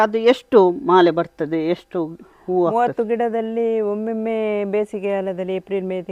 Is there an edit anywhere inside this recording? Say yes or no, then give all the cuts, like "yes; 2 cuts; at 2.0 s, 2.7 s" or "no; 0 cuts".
no; 0 cuts